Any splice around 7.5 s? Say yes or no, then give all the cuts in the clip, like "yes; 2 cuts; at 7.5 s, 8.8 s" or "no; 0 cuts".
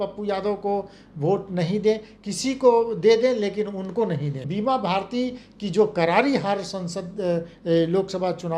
no; 1 cut; at 4.5 s